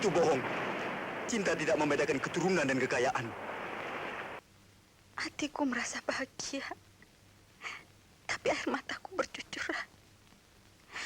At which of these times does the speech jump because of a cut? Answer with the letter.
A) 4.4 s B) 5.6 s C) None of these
A